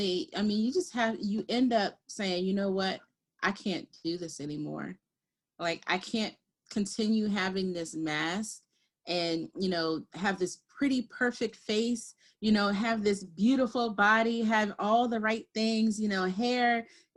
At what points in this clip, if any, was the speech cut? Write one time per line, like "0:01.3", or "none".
none